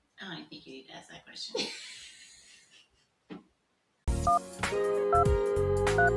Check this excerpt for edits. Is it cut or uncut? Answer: uncut